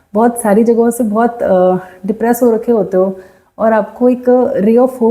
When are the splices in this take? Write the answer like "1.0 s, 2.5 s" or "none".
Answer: none